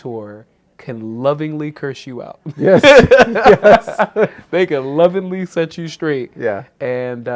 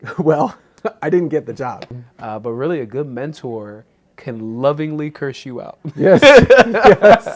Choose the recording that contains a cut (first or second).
second